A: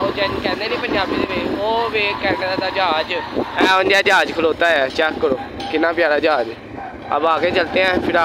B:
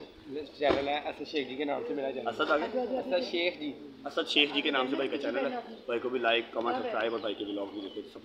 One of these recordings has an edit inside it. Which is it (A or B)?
A